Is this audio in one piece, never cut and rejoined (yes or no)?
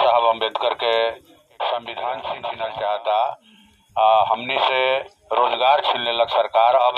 no